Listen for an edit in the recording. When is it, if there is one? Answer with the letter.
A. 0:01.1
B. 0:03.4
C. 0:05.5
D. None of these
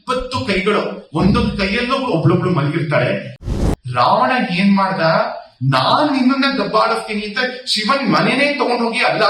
B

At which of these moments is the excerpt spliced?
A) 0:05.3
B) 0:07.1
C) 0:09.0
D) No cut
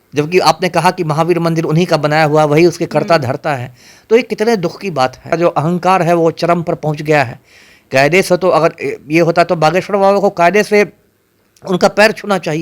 A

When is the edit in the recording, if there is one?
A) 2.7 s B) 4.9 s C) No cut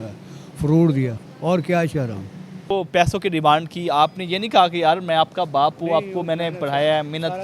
A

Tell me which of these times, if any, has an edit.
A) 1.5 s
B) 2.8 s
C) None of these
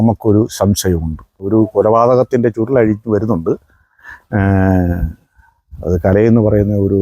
A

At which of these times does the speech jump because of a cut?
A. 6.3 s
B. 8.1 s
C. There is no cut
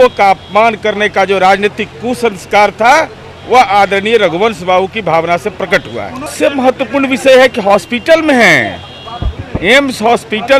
A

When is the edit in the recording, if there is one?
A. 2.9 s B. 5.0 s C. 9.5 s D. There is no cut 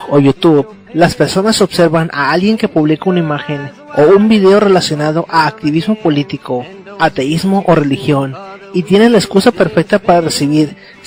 D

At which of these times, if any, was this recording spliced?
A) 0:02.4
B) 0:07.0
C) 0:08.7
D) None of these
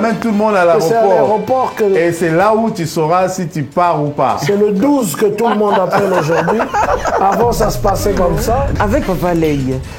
C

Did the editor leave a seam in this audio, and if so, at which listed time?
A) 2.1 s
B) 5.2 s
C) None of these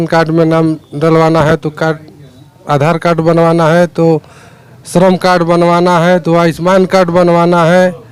C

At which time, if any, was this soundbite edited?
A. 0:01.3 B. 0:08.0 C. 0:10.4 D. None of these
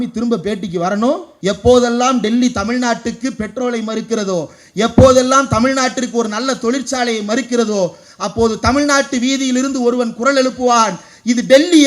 A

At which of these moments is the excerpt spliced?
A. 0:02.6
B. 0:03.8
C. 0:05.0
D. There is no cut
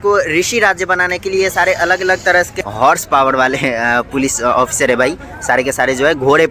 A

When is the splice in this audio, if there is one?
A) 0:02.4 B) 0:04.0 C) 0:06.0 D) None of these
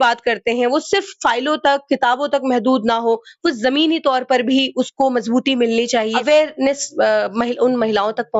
C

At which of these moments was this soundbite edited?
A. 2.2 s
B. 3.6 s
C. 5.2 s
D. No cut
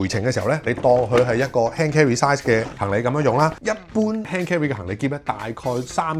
B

